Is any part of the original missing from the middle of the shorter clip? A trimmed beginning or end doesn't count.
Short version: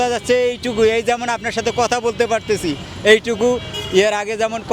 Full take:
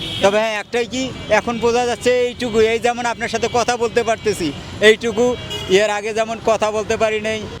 no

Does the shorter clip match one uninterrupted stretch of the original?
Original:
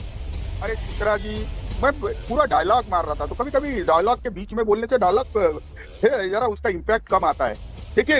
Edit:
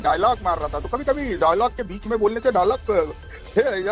yes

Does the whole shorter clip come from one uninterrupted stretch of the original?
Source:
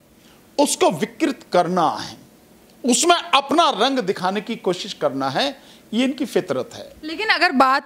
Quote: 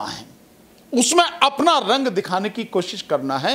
yes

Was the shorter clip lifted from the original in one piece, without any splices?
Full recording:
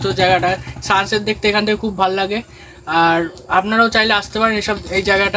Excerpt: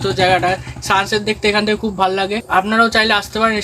no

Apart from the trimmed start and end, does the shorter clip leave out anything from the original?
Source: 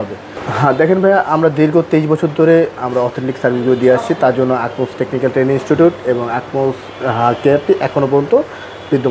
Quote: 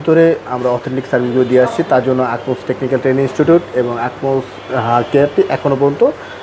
no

